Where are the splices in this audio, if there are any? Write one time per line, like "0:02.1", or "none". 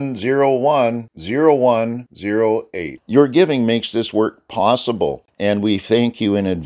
0:05.3